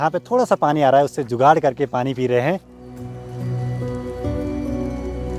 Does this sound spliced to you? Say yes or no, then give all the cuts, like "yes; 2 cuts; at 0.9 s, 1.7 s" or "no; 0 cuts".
no; 0 cuts